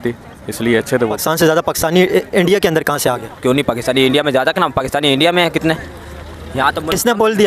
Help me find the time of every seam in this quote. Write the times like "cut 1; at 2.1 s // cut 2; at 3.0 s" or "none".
cut 1; at 1.2 s